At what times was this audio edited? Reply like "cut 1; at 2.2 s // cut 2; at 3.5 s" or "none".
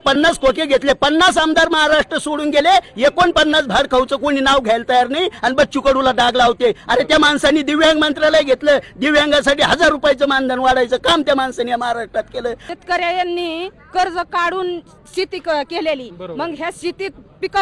cut 1; at 12.7 s